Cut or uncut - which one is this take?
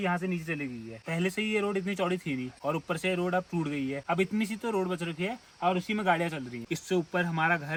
uncut